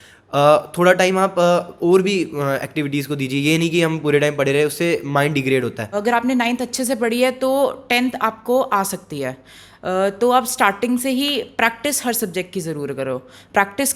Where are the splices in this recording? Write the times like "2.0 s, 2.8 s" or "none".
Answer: 5.8 s